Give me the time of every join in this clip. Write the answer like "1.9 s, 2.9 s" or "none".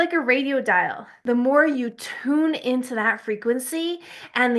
1.1 s